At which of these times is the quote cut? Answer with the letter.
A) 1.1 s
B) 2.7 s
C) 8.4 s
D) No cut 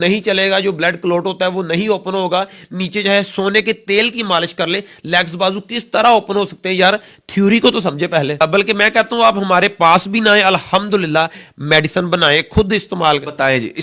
C